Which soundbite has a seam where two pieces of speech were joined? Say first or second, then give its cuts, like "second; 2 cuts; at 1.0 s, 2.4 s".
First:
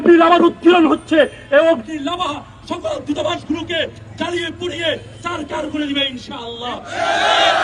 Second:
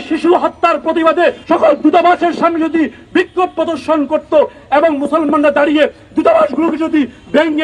second; 1 cut; at 1.4 s